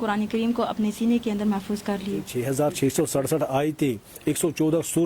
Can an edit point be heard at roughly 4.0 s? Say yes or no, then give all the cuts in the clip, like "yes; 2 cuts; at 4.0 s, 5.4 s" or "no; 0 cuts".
no; 1 cut; at 2.3 s